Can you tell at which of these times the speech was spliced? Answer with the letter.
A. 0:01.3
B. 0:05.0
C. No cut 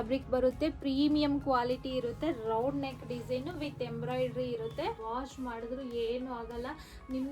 B